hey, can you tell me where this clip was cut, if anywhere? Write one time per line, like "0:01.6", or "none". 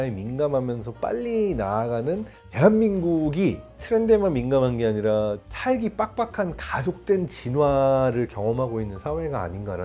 none